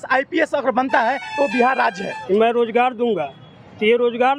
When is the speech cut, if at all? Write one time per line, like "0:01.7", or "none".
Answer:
0:02.1